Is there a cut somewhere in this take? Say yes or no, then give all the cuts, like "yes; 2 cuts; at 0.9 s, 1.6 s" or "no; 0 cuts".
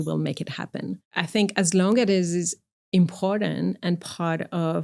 yes; 1 cut; at 1.1 s